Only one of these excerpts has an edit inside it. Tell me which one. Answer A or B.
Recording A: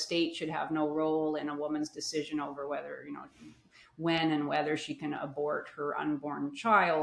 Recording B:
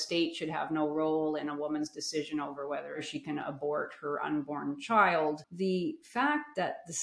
B